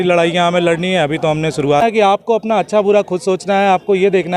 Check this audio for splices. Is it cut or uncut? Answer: cut